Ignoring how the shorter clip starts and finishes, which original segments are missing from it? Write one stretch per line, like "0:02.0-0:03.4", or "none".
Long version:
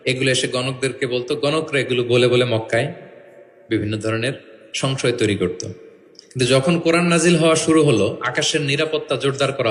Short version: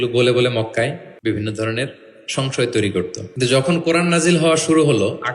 0:03.0-0:03.5
0:05.7-0:06.2